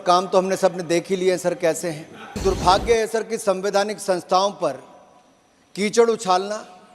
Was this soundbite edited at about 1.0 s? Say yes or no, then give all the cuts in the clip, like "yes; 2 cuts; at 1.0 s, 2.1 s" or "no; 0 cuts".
no; 1 cut; at 2.4 s